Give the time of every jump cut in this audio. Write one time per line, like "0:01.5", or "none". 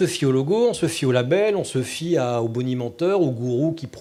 none